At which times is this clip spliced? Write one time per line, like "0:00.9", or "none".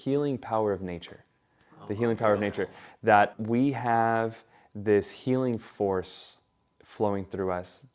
0:03.3